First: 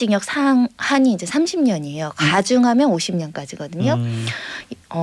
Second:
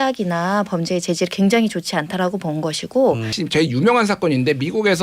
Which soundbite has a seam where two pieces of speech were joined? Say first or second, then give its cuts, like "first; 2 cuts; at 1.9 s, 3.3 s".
second; 1 cut; at 3.4 s